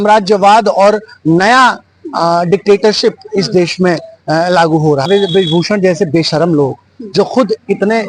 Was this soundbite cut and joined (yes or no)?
yes